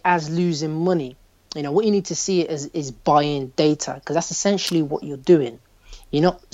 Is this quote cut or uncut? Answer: uncut